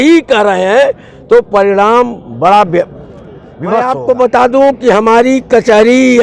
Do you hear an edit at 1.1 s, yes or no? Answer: no